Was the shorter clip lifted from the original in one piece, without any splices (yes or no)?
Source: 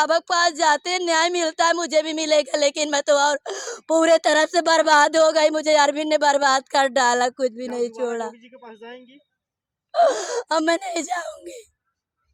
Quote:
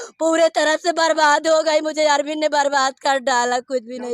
yes